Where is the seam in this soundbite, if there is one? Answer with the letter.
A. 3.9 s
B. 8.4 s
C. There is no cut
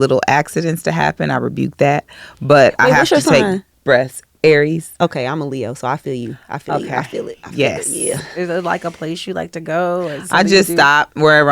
B